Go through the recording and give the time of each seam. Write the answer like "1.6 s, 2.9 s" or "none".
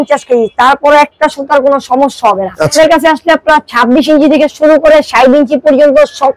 2.8 s